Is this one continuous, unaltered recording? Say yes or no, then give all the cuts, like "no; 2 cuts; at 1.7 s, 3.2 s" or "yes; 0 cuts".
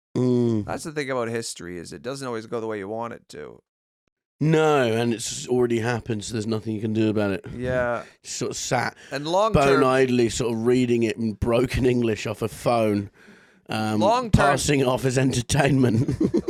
yes; 0 cuts